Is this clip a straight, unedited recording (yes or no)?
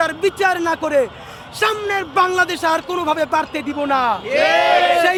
yes